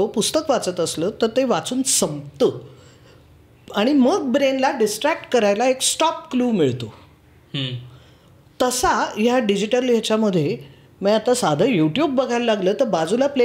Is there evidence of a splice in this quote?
no; 0 cuts

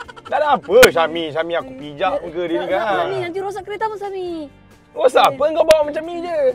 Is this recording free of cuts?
yes; 0 cuts

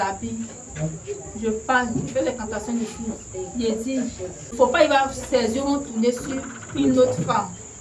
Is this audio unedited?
no; 1 cut; at 4.4 s

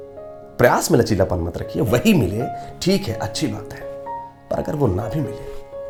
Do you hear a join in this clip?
no; 0 cuts

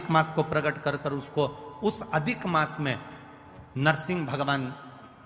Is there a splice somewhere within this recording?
no; 0 cuts

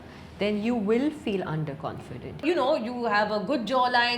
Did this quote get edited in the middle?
yes; 1 cut; at 2.4 s

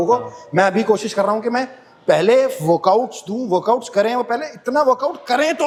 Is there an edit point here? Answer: no; 0 cuts

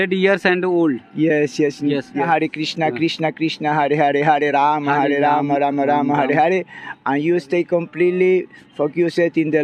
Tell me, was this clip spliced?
yes; 1 cut; at 2.2 s

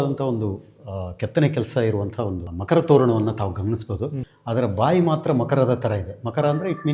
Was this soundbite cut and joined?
yes; 2 cuts; at 2.5 s, 4.3 s

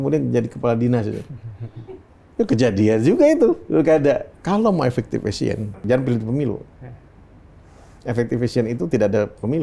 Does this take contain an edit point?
yes; 2 cuts; at 4.3 s, 5.8 s

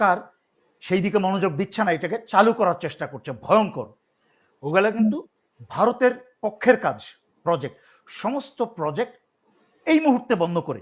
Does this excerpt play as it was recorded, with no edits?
yes; 0 cuts

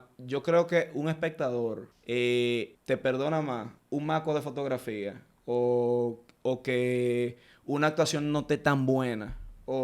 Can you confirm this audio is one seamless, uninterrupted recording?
no; 3 cuts; at 1.9 s, 2.8 s, 3.7 s

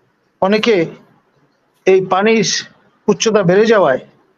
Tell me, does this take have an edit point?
no; 0 cuts

